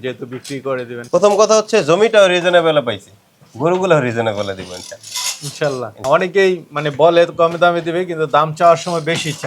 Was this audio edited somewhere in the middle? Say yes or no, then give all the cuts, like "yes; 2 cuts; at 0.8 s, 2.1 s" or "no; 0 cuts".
yes; 2 cuts; at 1.0 s, 5.9 s